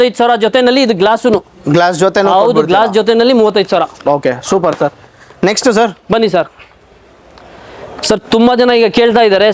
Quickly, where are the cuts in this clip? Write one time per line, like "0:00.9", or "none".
none